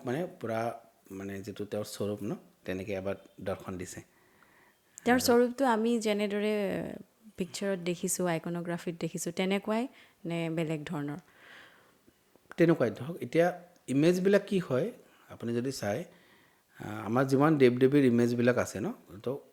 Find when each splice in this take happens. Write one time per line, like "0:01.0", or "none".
none